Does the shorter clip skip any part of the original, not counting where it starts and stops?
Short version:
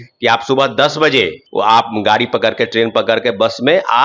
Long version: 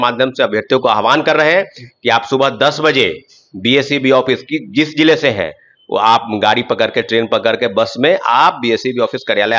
yes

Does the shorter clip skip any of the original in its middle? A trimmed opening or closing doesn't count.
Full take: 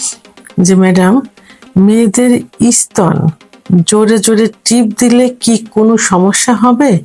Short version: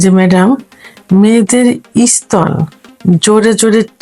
no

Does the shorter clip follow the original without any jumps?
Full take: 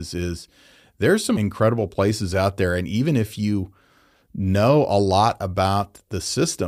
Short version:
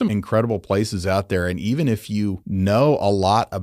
no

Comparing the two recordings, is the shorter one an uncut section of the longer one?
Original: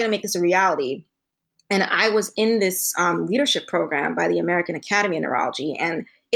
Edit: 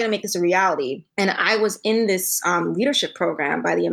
no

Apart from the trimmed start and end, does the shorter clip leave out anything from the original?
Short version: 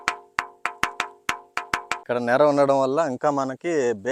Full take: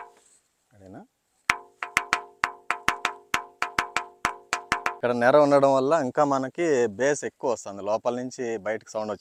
yes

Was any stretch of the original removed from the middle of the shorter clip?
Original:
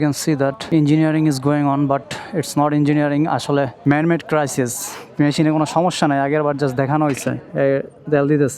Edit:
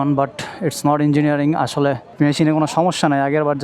yes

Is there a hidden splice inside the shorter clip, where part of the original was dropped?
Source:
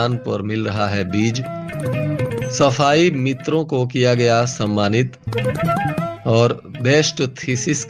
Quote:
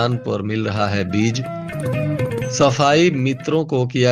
no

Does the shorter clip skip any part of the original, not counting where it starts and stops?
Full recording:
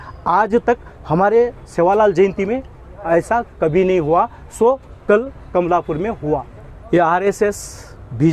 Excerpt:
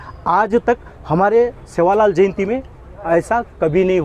no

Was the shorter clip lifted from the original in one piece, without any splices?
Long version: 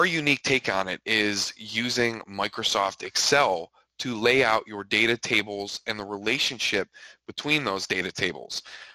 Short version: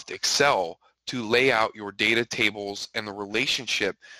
yes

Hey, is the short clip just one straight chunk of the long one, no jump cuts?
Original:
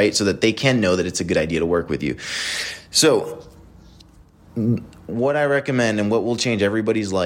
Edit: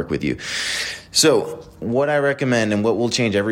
no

